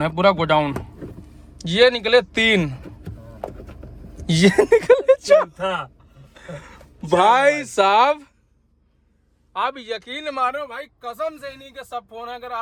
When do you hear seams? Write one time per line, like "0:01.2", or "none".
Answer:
none